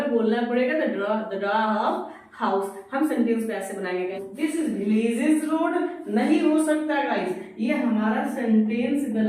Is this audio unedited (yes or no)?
no